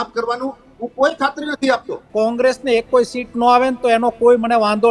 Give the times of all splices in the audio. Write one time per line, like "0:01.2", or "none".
0:02.0

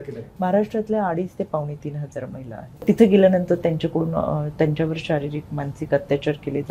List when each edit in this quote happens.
0:02.8

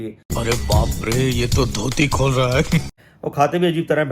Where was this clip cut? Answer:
0:02.9

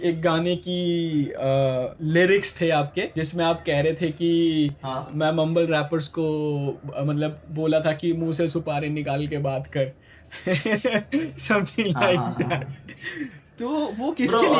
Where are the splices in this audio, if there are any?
0:02.0
0:03.2

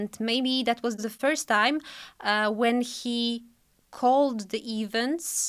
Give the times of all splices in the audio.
0:01.0

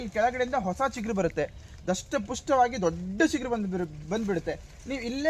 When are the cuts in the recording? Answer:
none

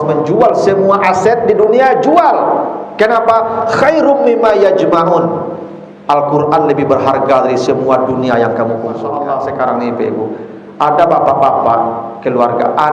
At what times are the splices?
0:09.1

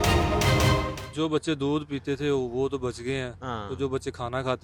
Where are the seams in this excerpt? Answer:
0:01.0

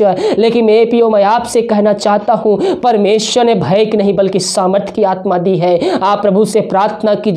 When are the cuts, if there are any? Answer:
none

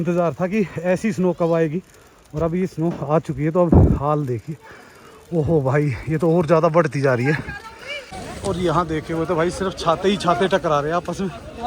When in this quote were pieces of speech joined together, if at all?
0:08.1

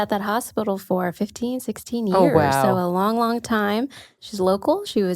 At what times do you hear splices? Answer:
0:04.1

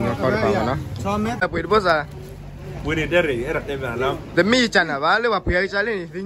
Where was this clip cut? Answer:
0:01.4

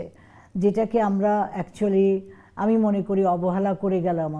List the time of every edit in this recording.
none

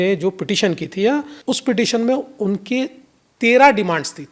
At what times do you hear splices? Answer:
0:01.3

